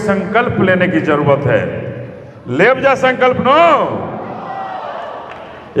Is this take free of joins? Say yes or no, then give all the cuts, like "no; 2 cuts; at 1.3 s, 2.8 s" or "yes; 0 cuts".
yes; 0 cuts